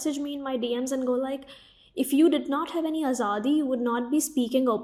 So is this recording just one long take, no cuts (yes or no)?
yes